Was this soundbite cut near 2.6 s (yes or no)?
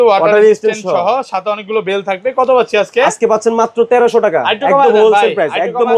no